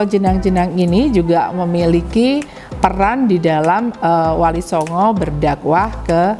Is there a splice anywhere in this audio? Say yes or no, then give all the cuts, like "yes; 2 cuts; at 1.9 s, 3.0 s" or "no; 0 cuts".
no; 0 cuts